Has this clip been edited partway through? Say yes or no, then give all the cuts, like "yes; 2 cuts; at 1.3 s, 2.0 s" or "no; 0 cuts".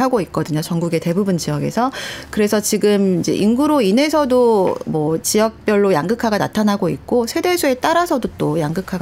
no; 0 cuts